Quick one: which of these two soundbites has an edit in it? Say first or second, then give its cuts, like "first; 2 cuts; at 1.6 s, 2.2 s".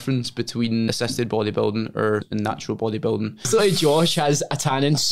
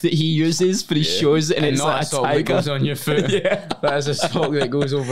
first; 3 cuts; at 0.9 s, 2.3 s, 3.5 s